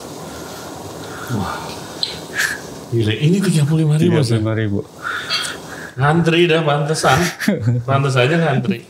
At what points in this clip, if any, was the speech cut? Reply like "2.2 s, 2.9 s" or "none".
none